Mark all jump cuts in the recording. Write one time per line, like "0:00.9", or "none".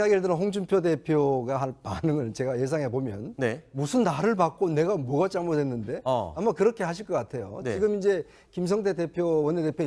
0:01.0